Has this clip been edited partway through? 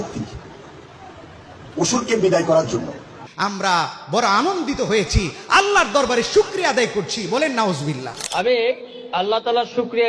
yes; 2 cuts; at 3.3 s, 8.1 s

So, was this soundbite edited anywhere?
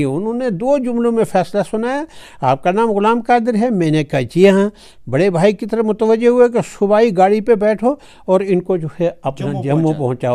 no; 0 cuts

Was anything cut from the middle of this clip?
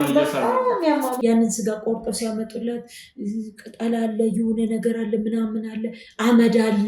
yes; 1 cut; at 1.2 s

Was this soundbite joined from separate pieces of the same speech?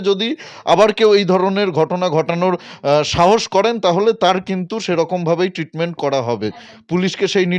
no; 0 cuts

